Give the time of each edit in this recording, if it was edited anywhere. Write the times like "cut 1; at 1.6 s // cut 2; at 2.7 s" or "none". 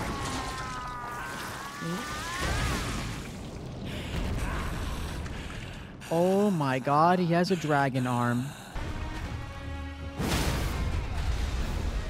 cut 1; at 8.8 s